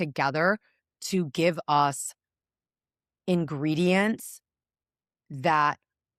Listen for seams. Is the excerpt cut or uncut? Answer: uncut